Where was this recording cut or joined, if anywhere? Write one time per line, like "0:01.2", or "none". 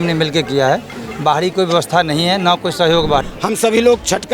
0:03.2